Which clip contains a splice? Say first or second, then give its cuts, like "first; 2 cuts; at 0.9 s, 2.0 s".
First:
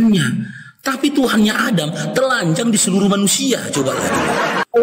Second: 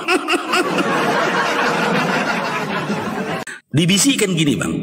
second; 1 cut; at 3.4 s